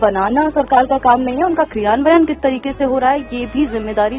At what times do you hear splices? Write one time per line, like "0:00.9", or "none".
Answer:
none